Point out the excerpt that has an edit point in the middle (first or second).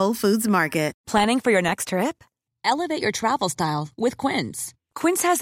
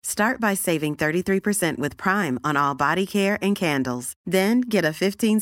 first